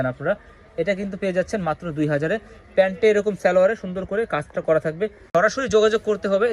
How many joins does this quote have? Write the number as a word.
one